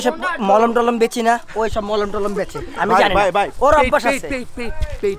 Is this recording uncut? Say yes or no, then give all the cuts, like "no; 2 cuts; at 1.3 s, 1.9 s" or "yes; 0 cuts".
yes; 0 cuts